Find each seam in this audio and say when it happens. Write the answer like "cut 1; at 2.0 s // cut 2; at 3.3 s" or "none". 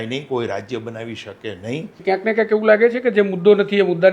cut 1; at 1.9 s